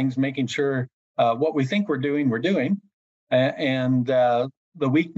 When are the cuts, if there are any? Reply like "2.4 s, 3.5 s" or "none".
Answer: none